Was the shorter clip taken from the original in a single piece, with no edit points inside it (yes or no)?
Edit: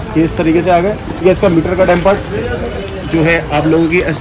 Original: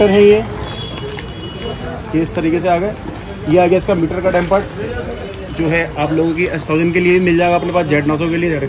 no